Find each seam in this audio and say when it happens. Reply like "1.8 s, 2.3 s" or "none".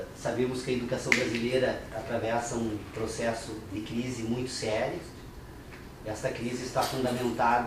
2.5 s